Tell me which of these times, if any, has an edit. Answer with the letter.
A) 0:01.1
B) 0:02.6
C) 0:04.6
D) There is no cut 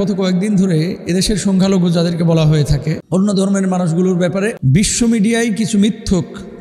C